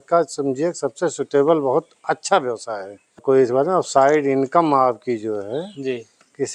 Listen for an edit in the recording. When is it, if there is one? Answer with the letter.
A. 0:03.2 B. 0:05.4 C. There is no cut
A